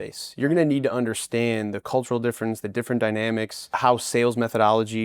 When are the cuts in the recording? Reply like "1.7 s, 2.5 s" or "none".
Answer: 3.8 s